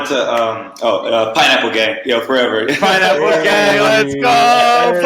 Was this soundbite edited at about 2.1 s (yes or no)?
no